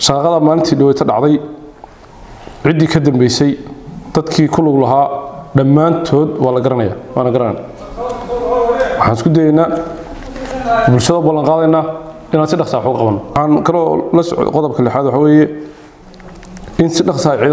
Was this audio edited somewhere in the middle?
yes; 1 cut; at 13.3 s

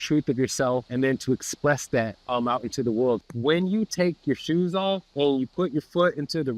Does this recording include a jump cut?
yes; 4 cuts; at 0.9 s, 2.2 s, 3.2 s, 5.1 s

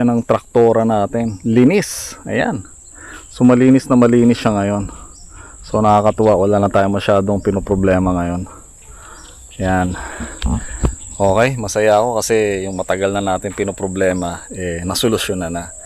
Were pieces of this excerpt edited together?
no; 0 cuts

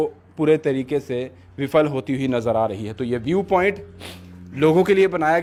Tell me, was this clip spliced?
no; 0 cuts

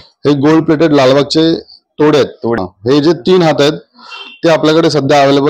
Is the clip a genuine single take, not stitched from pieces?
no; 1 cut; at 2.6 s

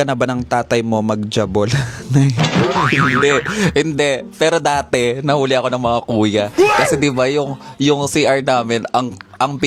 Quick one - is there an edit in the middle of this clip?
no; 0 cuts

